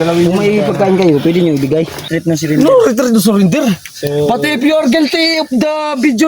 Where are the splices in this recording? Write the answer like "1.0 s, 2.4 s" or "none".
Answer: 2.1 s